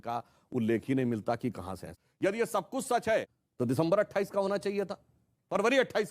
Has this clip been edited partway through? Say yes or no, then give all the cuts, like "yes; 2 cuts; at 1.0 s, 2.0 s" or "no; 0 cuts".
yes; 2 cuts; at 1.8 s, 3.4 s